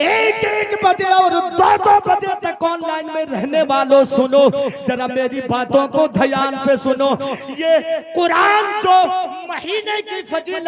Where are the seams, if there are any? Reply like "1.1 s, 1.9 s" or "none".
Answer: none

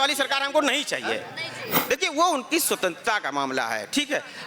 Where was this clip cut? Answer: 1.6 s

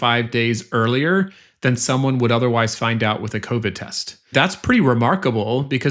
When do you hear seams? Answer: 4.3 s

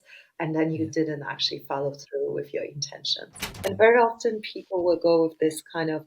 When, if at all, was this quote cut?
3.5 s

